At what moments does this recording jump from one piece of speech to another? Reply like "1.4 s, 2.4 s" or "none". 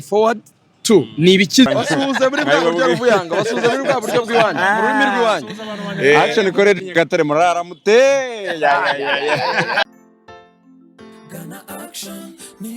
1.7 s, 9.8 s